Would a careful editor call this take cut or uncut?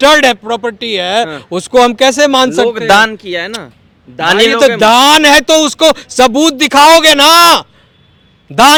uncut